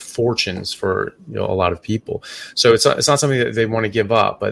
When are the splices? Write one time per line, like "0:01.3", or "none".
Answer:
none